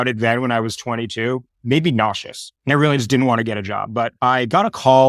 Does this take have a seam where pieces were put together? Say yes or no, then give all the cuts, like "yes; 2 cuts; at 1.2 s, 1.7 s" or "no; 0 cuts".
no; 0 cuts